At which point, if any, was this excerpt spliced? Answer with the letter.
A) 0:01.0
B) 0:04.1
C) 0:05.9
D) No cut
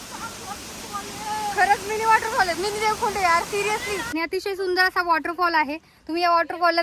B